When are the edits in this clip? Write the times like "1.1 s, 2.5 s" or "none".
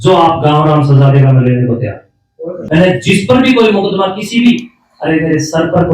2.5 s